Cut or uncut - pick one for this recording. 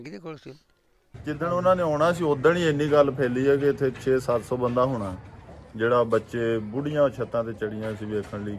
cut